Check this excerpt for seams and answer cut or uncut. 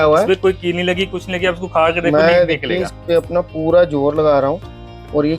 uncut